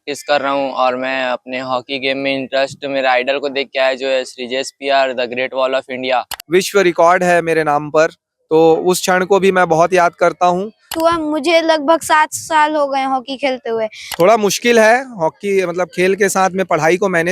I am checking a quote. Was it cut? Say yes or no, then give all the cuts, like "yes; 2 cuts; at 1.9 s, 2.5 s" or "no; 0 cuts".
yes; 3 cuts; at 6.3 s, 10.9 s, 14.1 s